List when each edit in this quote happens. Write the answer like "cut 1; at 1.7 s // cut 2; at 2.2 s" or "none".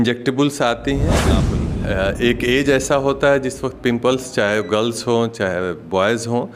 cut 1; at 1.3 s